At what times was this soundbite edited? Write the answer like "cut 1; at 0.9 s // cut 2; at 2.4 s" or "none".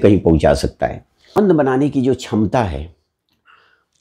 cut 1; at 1.3 s